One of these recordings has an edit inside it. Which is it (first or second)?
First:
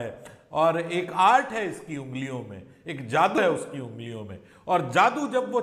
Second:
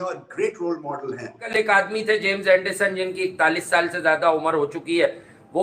second